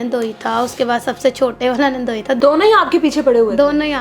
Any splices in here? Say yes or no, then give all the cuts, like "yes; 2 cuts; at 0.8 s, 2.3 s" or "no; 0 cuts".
yes; 1 cut; at 2.4 s